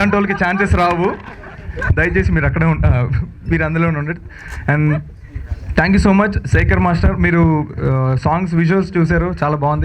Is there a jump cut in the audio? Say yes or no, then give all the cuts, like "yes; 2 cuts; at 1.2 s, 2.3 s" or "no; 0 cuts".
no; 0 cuts